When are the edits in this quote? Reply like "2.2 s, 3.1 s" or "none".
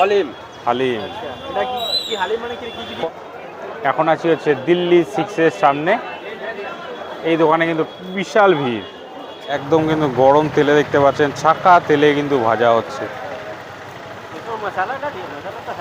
3.0 s, 9.6 s